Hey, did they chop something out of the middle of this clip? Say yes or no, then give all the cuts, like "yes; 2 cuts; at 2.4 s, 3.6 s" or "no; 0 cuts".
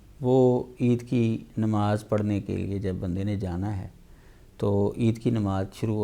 no; 0 cuts